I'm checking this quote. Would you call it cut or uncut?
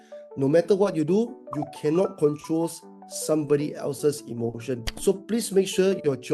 cut